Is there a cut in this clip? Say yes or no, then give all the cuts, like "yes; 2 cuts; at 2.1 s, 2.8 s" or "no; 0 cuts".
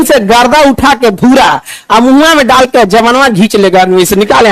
no; 0 cuts